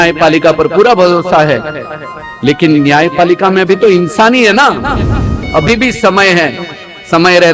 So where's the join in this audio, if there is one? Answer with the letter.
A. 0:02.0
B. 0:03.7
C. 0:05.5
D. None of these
C